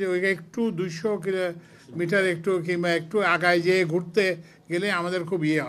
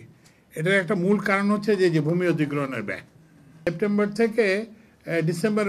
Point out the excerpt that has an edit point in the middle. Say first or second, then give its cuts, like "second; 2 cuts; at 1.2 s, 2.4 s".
second; 1 cut; at 3.7 s